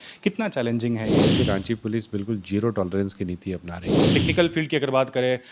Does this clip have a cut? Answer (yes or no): yes